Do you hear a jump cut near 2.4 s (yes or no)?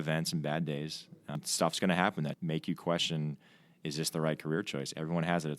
yes